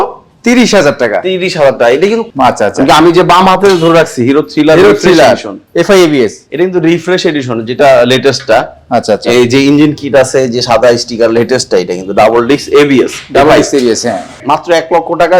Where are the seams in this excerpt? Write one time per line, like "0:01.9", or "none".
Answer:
0:02.3
0:14.4